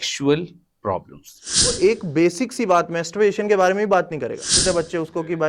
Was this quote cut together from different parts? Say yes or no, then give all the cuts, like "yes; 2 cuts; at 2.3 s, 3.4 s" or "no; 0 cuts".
yes; 2 cuts; at 1.8 s, 4.6 s